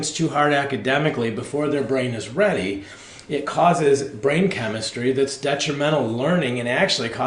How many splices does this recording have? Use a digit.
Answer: 0